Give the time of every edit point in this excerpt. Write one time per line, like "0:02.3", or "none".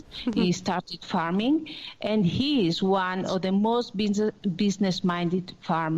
none